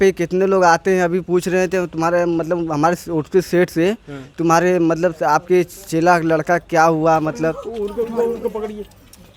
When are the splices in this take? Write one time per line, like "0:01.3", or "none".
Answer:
none